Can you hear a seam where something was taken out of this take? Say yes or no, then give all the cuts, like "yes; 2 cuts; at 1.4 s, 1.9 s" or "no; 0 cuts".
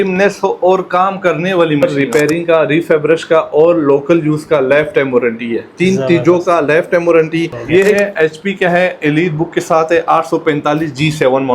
yes; 2 cuts; at 1.8 s, 7.6 s